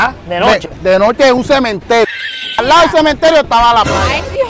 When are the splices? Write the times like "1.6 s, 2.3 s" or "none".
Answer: 2.6 s